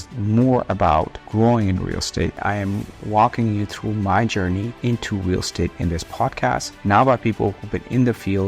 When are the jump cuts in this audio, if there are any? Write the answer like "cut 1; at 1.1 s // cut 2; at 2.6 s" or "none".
cut 1; at 2.3 s // cut 2; at 4.7 s // cut 3; at 6.7 s